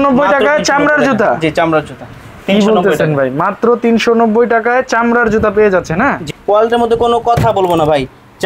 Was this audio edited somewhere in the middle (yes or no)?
yes